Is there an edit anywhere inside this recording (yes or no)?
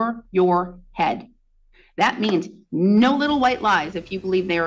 no